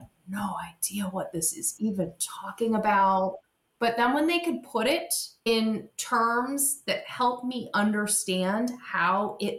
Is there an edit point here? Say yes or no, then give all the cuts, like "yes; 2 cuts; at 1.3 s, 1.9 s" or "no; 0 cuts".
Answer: yes; 1 cut; at 3.4 s